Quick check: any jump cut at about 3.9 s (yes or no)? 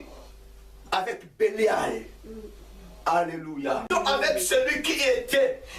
yes